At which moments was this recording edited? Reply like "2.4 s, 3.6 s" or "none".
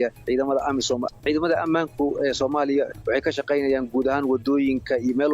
1.2 s, 2.9 s